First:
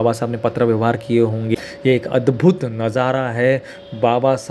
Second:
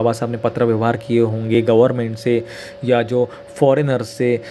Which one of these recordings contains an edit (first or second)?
first